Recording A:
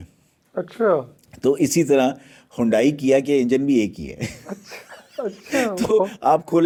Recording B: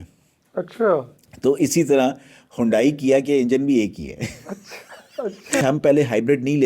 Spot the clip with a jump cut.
B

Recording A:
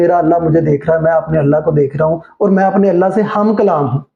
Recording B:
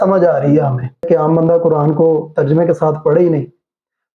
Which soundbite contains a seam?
B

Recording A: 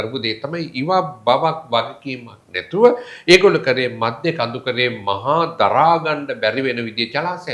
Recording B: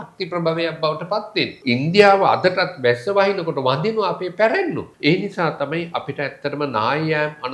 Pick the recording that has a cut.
B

